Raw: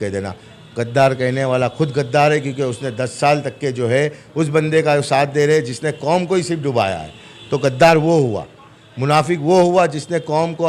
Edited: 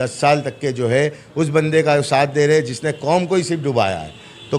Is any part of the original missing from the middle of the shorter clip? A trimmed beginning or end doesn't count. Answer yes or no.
no